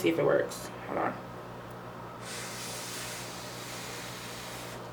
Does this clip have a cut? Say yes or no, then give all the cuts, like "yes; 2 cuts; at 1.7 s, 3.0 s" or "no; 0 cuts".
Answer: no; 0 cuts